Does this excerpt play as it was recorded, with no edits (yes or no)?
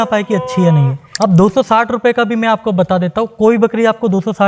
no